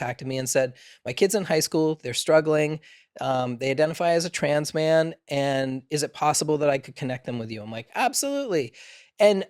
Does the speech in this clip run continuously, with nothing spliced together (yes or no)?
yes